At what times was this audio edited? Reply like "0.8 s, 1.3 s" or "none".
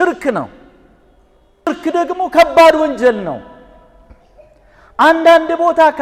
1.7 s

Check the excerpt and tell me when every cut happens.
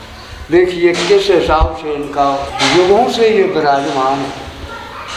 2.5 s

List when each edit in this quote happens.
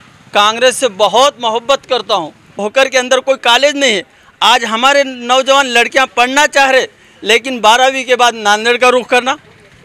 2.5 s

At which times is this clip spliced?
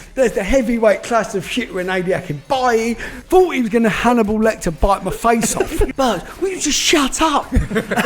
3.1 s, 5.9 s

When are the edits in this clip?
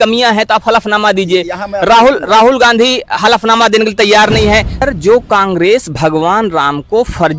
4.8 s

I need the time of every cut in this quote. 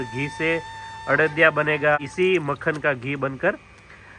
2.0 s

